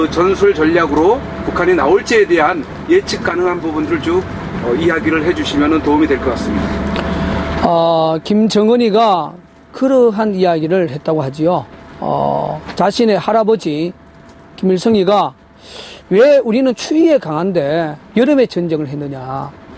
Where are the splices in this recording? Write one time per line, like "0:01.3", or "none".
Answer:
0:05.1